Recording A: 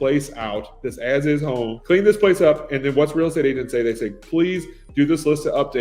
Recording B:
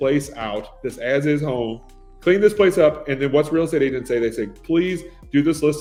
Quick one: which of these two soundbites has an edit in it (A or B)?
A